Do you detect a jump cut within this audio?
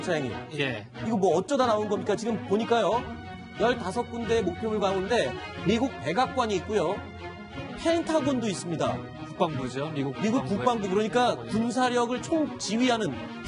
yes; 1 cut; at 8.4 s

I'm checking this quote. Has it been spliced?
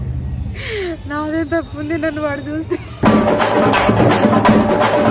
no; 0 cuts

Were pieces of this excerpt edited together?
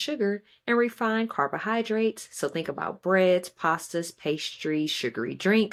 no; 0 cuts

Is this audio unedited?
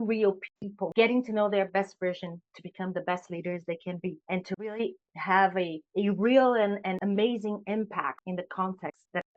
no; 2 cuts; at 7.0 s, 8.2 s

